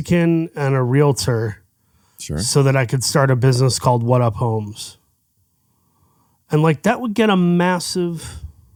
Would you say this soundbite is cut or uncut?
uncut